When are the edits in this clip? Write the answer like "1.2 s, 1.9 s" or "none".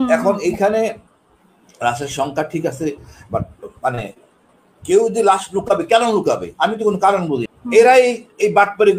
7.5 s